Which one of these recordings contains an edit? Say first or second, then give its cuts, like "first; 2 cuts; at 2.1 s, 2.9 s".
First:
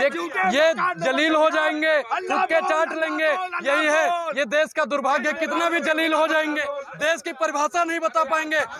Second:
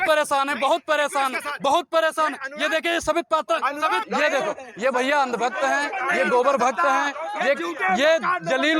second; 1 cut; at 4.1 s